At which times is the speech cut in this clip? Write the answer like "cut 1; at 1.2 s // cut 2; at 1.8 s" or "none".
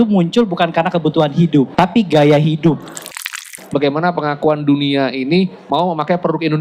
cut 1; at 1.7 s // cut 2; at 3.2 s